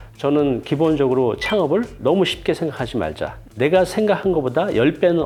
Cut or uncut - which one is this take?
uncut